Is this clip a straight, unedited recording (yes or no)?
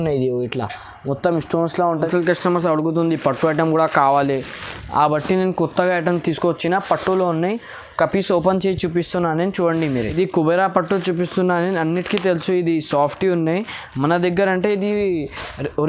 no